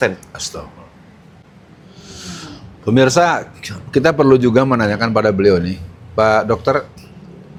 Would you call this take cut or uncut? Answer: uncut